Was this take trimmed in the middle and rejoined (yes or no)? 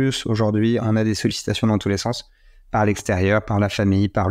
no